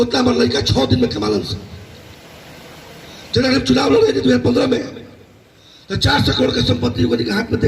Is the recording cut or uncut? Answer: cut